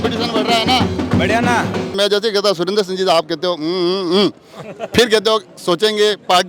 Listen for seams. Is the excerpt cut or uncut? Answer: cut